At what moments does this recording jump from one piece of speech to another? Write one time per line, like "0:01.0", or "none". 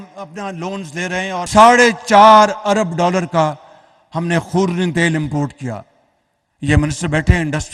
0:01.5